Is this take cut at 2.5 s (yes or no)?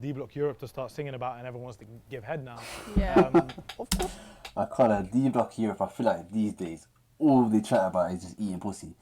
yes